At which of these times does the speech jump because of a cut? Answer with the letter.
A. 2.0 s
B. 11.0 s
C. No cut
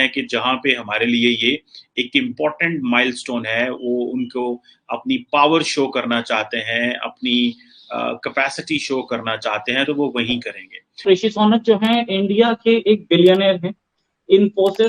B